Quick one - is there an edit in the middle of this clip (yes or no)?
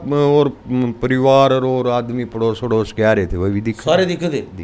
no